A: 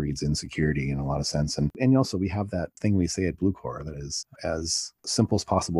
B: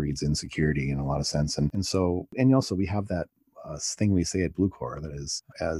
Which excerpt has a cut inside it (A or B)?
A